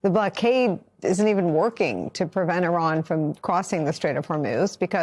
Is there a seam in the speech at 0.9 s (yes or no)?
yes